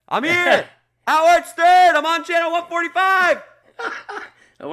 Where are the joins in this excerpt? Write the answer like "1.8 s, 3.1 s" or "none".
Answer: none